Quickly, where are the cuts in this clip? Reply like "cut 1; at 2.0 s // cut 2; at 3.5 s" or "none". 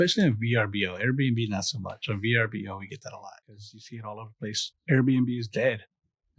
cut 1; at 4.0 s

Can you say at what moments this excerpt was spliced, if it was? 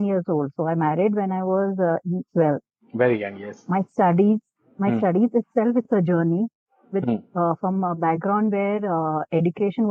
none

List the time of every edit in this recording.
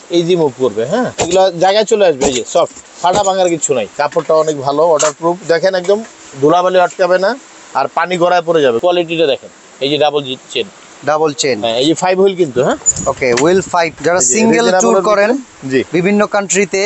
cut 1; at 1.2 s // cut 2; at 3.9 s // cut 3; at 8.8 s // cut 4; at 13.9 s

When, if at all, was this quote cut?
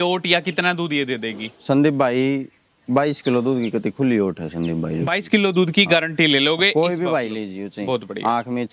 none

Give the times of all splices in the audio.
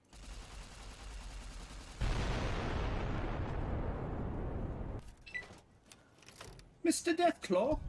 cut 1; at 4.9 s

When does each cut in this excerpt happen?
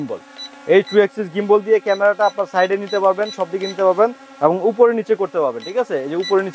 none

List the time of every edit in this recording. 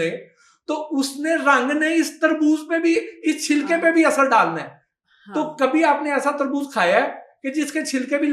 none

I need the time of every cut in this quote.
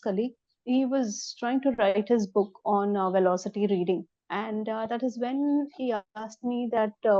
cut 1; at 4.2 s

